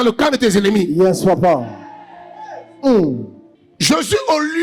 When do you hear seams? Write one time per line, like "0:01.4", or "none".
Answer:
none

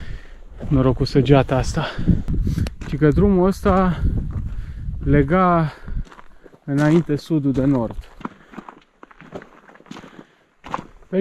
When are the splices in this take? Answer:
0:02.3
0:08.2

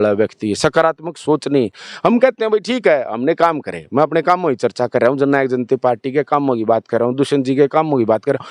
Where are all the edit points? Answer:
none

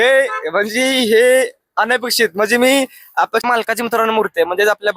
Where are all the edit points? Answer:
0:03.4

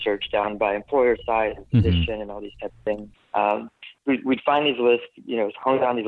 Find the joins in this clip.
none

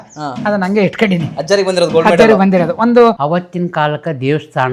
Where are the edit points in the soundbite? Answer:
0:03.2

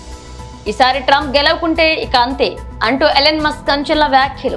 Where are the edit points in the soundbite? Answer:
none

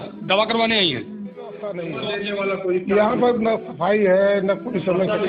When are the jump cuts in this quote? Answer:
0:01.7

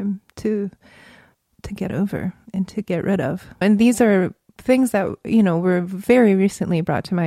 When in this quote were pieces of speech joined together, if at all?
none

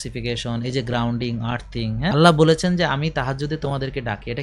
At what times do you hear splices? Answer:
0:02.1

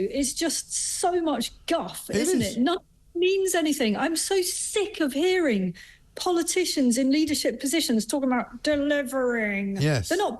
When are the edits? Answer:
none

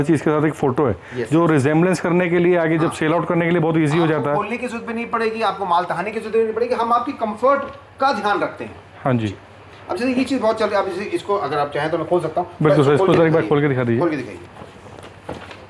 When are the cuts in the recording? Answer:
none

